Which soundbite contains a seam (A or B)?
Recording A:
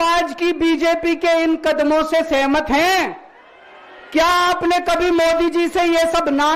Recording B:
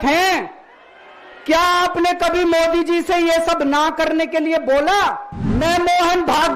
B